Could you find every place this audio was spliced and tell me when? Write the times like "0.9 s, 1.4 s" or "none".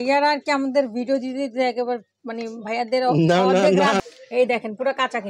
4.0 s